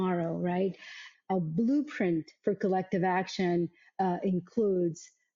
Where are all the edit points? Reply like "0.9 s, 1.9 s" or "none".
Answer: 1.0 s